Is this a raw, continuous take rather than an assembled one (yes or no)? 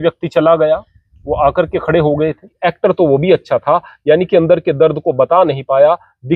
no